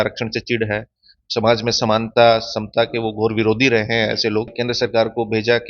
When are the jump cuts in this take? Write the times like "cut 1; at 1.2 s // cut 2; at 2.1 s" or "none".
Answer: cut 1; at 4.5 s